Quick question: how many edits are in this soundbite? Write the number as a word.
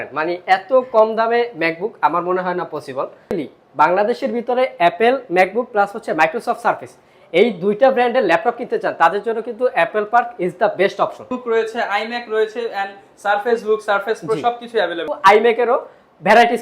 three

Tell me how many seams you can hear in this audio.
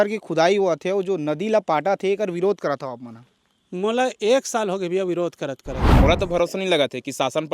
one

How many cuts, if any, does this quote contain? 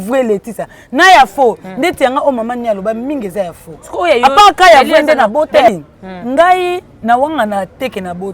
one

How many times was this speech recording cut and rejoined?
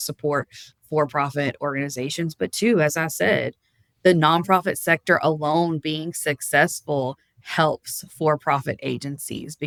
zero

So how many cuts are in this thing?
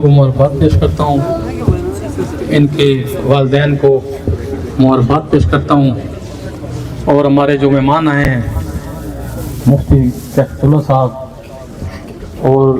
zero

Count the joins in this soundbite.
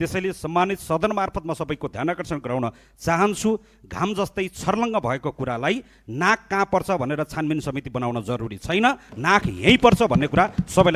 zero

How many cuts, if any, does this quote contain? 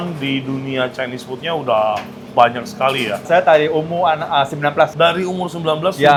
zero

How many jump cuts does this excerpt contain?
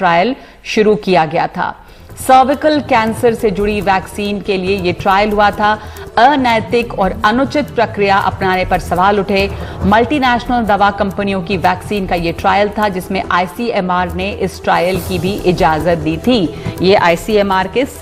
zero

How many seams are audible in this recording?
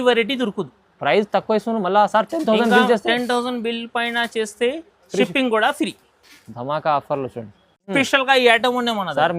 one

